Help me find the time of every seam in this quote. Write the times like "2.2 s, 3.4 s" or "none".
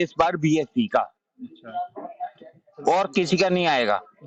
none